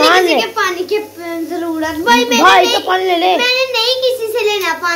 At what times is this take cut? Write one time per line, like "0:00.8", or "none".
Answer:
none